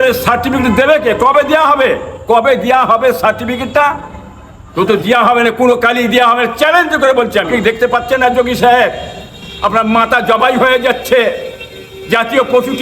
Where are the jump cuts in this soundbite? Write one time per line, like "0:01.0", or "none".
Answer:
0:07.5